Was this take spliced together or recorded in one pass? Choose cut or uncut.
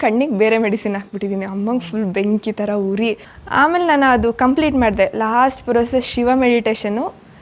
cut